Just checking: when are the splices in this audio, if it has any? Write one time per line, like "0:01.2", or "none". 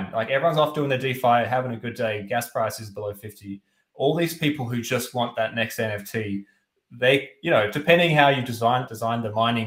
none

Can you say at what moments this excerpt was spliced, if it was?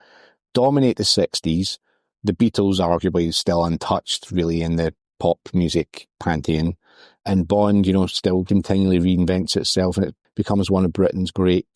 0:08.5
0:10.2

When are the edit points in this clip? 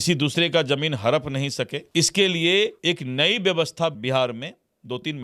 0:01.8
0:02.8
0:04.0

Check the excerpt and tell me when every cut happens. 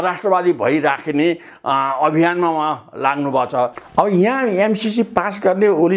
0:03.8

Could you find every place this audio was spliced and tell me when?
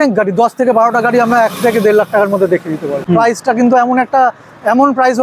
0:03.0

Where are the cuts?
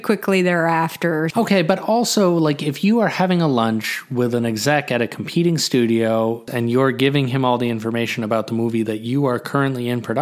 0:01.3
0:06.5

